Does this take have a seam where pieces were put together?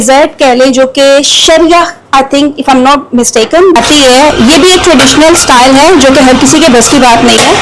yes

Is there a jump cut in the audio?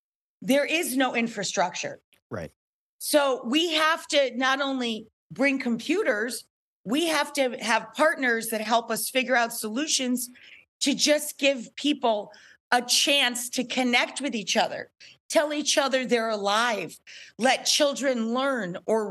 no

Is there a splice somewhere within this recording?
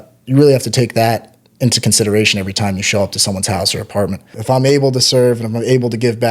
yes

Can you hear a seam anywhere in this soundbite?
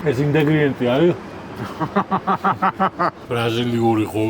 yes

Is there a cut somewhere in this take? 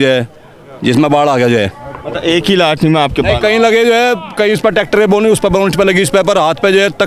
no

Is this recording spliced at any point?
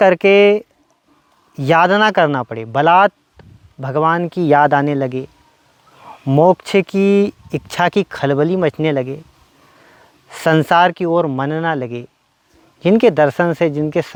no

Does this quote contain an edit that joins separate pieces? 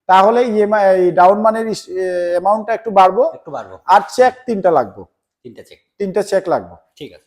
no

